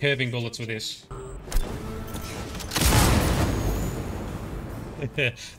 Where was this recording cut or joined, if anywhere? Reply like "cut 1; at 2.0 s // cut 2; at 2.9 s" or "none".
cut 1; at 1.1 s